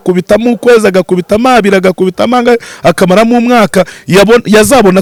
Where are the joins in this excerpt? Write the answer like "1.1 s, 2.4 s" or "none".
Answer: none